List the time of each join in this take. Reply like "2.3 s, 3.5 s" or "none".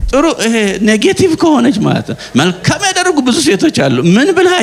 none